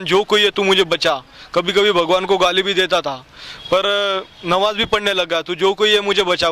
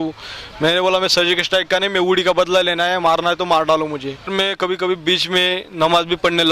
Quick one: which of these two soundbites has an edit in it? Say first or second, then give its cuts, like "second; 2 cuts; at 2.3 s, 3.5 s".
second; 1 cut; at 4.3 s